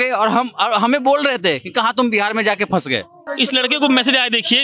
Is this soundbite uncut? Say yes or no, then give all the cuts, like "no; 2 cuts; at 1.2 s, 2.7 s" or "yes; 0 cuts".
no; 1 cut; at 3.2 s